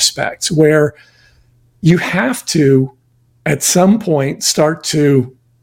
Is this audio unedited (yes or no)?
yes